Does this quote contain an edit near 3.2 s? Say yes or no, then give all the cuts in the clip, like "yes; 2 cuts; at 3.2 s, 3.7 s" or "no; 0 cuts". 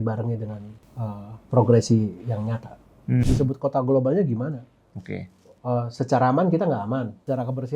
yes; 1 cut; at 3.2 s